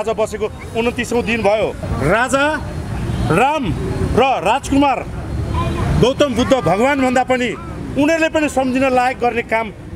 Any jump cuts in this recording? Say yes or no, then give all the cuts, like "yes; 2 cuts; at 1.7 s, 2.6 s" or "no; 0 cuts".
yes; 1 cut; at 1.8 s